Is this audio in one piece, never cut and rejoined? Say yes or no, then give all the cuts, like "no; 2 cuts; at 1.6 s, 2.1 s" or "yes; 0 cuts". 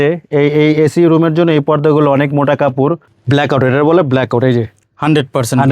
no; 1 cut; at 3.1 s